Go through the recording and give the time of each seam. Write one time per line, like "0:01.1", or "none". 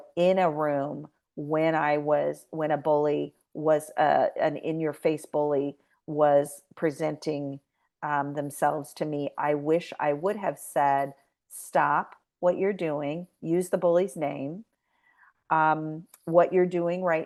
none